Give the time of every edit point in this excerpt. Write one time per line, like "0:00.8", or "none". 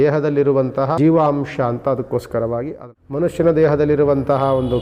0:01.0
0:02.8